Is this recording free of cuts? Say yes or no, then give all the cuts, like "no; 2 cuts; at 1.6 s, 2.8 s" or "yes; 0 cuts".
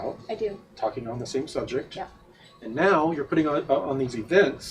no; 1 cut; at 1.5 s